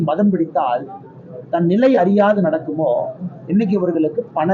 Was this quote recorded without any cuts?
yes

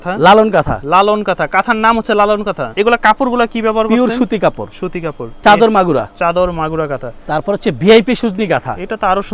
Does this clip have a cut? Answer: yes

